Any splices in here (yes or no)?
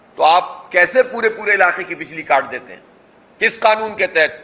no